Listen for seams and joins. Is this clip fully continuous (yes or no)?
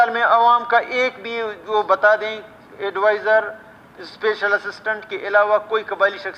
yes